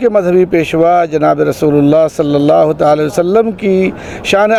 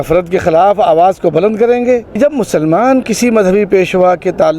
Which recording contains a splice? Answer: second; 1 cut; at 2.2 s

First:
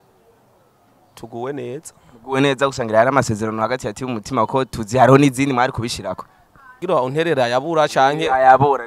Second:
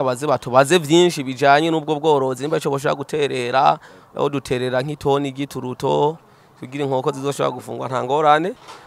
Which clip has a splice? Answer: first; 1 cut; at 6.8 s

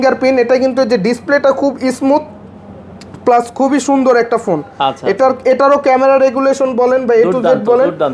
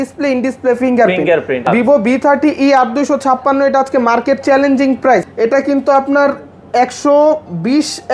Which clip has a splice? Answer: second; 2 cuts; at 1.7 s, 5.3 s

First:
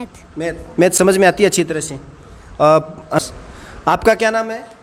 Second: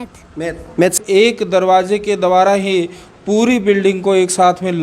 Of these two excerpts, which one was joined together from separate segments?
second; 1 cut; at 1.0 s

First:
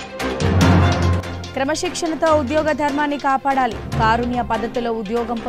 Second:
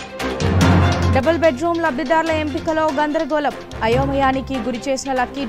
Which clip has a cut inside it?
first; 1 cut; at 1.0 s

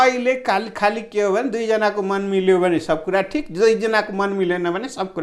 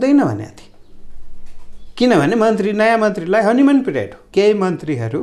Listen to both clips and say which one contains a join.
second; 1 cut; at 4.2 s

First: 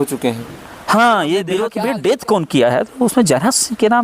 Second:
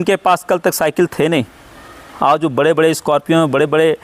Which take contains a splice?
first; 1 cut; at 1.7 s

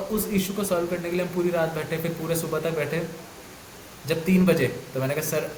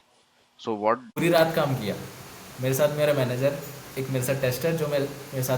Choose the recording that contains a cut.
second; 1 cut; at 1.1 s

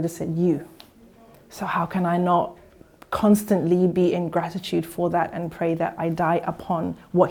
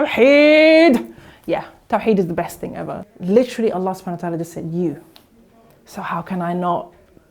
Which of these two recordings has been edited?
second; 1 cut; at 2.9 s

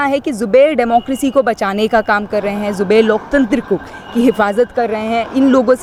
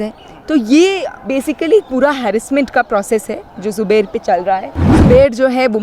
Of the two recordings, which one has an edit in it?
second; 1 cut; at 4.8 s

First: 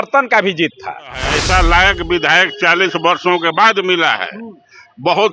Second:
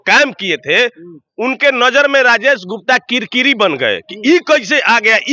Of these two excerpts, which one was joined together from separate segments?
first; 1 cut; at 1.3 s

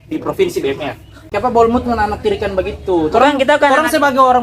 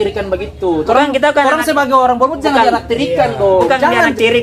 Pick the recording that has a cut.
first; 1 cut; at 1.3 s

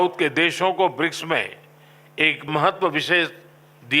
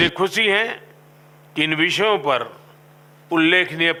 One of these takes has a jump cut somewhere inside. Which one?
first; 1 cut; at 2.5 s

